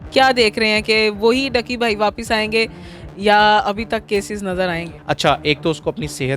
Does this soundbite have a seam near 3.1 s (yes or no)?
no